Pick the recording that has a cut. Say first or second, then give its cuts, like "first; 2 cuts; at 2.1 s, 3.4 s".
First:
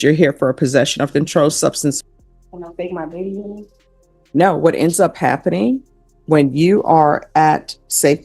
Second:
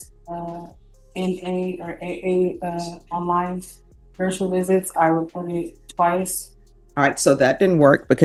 first; 1 cut; at 2.0 s